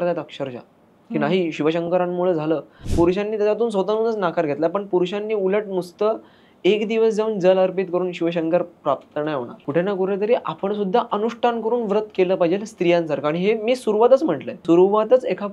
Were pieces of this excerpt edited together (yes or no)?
yes